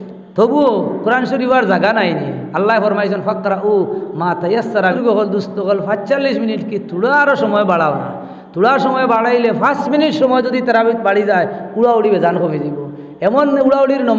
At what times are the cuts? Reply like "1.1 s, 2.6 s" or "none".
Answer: 5.0 s